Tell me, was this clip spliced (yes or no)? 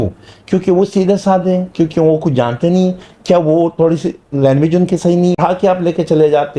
yes